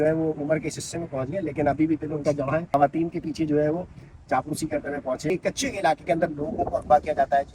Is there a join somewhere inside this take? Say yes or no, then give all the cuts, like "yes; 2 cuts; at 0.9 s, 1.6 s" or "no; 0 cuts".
yes; 2 cuts; at 2.7 s, 5.3 s